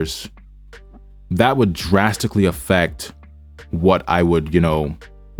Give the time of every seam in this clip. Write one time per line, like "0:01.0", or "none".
none